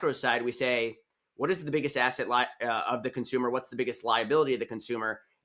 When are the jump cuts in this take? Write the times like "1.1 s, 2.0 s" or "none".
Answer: none